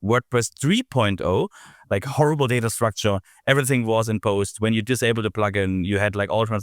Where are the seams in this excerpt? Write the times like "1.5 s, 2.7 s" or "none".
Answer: 1.6 s